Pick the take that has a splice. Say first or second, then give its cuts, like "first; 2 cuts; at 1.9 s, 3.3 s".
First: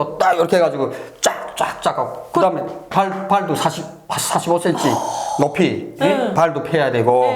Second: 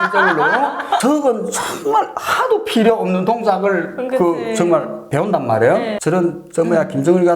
second; 2 cuts; at 1.0 s, 6.0 s